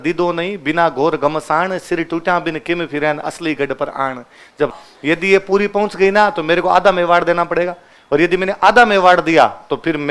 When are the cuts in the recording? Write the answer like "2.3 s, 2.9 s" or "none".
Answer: 4.8 s